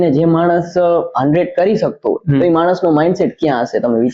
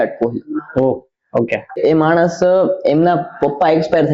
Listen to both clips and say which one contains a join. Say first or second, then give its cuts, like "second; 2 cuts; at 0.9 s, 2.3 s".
second; 1 cut; at 1.8 s